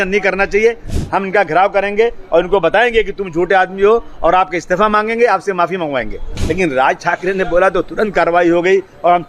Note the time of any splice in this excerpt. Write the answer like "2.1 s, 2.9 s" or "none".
1.0 s, 6.4 s